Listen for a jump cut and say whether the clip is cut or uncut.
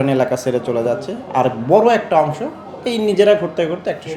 uncut